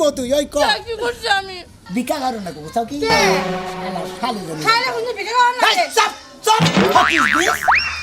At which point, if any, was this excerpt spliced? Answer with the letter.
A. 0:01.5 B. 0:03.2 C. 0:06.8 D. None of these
A